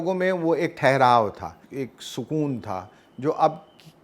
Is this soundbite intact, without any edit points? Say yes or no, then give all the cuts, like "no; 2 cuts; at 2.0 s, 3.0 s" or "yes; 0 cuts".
no; 1 cut; at 1.6 s